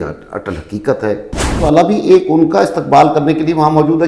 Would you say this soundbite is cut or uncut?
cut